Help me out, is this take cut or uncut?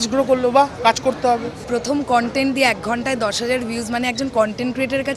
cut